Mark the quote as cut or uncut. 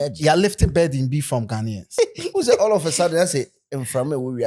cut